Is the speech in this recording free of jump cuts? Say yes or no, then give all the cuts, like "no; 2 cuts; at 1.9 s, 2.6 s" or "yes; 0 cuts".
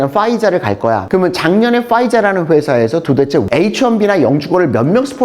no; 2 cuts; at 1.0 s, 3.5 s